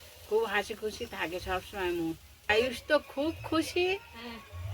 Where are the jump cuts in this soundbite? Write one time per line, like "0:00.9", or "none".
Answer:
0:02.5